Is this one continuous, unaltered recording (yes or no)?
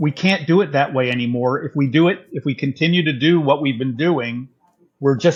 yes